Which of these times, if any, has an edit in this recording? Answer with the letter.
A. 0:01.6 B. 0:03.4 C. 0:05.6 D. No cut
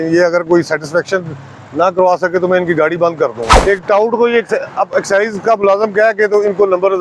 B